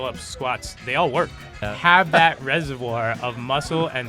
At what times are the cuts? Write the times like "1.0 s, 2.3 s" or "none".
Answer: 1.7 s